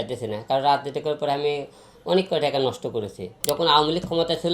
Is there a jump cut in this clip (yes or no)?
yes